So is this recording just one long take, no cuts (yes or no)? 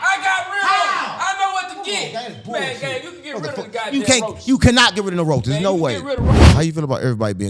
no